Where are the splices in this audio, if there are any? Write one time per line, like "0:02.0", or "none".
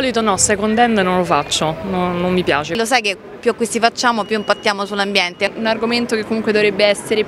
0:02.8
0:05.5